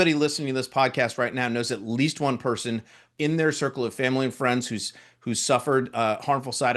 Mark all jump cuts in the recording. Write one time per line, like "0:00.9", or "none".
0:03.1